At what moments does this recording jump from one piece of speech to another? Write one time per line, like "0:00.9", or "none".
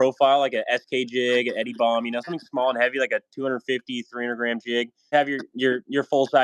0:05.1